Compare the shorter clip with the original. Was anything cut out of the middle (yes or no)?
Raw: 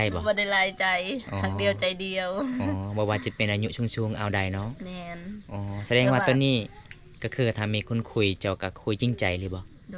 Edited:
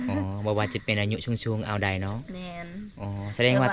no